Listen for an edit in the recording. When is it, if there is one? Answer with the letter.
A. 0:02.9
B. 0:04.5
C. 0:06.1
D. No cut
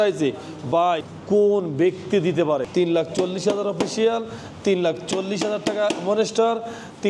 D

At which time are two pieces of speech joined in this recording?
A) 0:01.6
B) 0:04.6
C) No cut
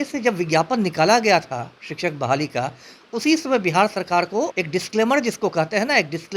B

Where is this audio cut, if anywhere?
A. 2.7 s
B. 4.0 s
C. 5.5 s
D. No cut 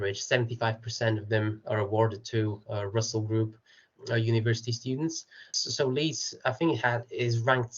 C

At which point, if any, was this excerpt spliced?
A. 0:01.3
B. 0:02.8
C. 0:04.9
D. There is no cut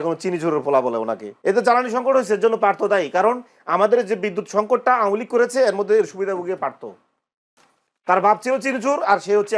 A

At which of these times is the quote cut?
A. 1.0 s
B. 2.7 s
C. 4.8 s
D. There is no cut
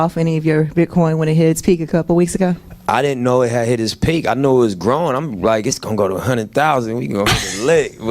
D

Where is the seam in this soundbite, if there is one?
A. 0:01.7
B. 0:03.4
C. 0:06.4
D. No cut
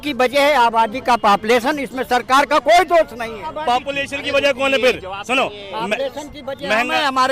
B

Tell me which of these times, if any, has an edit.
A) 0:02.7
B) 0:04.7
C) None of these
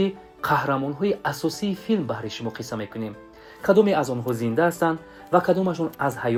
C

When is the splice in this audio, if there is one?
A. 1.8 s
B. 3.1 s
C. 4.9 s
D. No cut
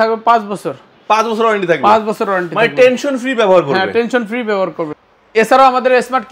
C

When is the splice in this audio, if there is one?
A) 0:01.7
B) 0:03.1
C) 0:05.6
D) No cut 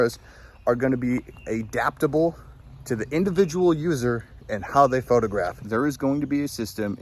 C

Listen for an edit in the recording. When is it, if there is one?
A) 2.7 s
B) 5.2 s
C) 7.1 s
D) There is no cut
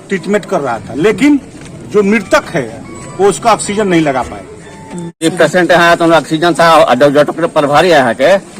B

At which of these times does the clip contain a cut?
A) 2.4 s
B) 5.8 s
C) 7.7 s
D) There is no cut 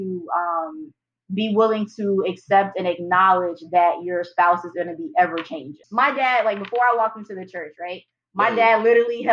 B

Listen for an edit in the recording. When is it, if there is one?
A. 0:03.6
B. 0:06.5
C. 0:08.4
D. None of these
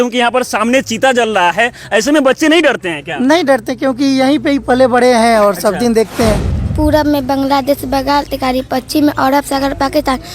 B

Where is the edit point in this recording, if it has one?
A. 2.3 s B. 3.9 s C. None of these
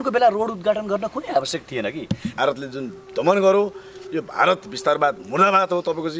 A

